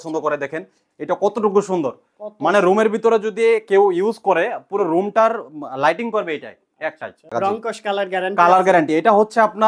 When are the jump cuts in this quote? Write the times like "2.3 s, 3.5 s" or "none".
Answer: 7.3 s

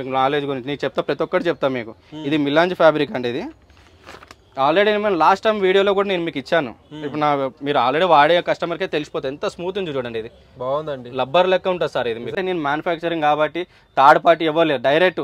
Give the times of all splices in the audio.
12.3 s

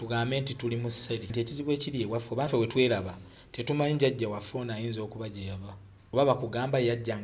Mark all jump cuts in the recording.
1.3 s, 2.5 s, 5.9 s

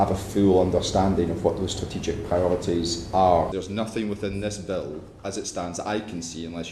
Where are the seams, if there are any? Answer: 3.5 s

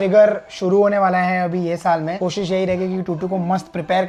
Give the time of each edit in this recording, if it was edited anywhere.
none

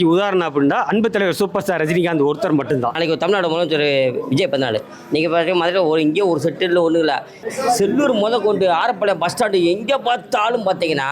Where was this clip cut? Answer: 2.9 s, 7.4 s

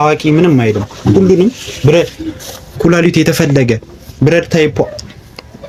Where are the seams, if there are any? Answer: none

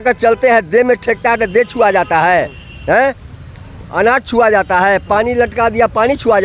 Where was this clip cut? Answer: none

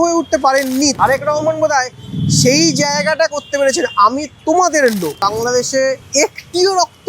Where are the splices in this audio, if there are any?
1.0 s, 4.3 s, 5.6 s

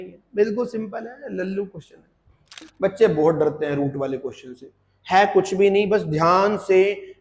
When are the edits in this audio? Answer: 2.6 s

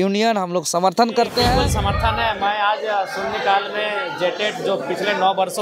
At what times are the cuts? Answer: 1.6 s

